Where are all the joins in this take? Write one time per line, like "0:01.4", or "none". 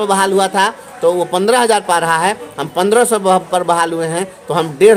none